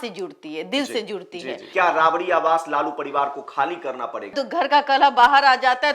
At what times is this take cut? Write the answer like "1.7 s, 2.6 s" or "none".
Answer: 1.6 s, 4.3 s